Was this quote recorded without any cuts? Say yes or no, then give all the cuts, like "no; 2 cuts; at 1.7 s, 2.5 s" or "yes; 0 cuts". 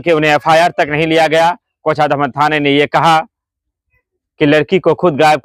yes; 0 cuts